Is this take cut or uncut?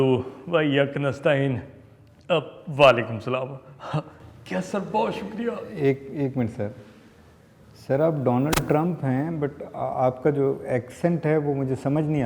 uncut